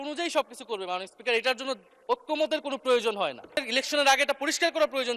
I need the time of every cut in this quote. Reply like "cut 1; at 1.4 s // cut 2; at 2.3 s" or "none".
cut 1; at 3.6 s